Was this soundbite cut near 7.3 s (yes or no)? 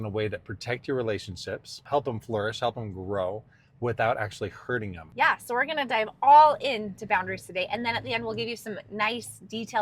no